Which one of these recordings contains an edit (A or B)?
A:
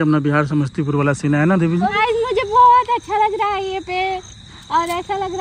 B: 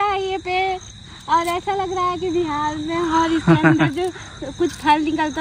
A